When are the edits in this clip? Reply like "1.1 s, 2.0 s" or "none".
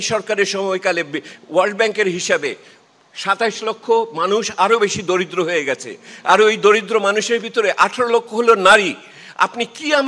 none